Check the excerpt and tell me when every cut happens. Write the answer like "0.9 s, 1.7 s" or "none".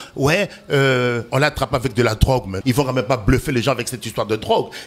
2.5 s